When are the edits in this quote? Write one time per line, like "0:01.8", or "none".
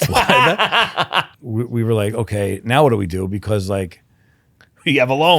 0:01.3